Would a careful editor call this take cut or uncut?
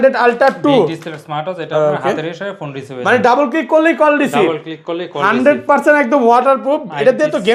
uncut